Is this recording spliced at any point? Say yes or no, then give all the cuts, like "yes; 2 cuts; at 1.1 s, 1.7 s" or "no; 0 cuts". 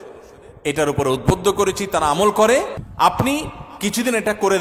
yes; 1 cut; at 2.8 s